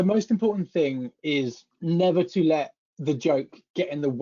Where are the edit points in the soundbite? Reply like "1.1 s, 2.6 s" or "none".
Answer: 1.7 s